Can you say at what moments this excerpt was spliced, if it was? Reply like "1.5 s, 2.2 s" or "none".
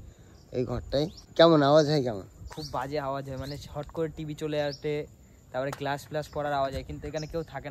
1.2 s